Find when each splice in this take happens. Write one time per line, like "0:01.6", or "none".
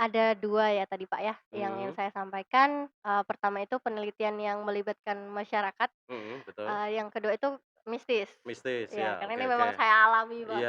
none